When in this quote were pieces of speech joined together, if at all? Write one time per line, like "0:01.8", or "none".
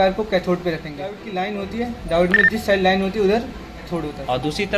0:01.3